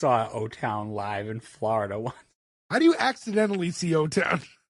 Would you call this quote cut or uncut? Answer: uncut